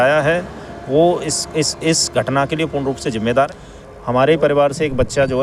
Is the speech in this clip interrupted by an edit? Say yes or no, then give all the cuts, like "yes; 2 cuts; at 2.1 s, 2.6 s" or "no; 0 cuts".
yes; 1 cut; at 3.5 s